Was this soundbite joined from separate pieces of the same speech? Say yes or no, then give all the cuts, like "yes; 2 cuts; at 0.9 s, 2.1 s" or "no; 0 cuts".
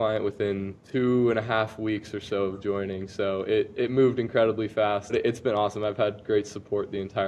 no; 0 cuts